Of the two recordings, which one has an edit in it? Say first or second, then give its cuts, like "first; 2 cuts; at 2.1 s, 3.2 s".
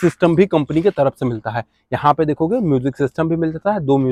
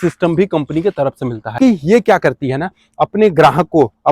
second; 1 cut; at 1.5 s